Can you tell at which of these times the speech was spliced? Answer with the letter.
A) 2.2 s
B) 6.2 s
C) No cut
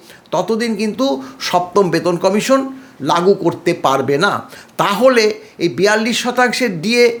C